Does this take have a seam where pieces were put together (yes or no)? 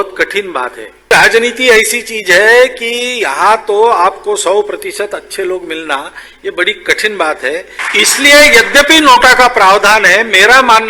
yes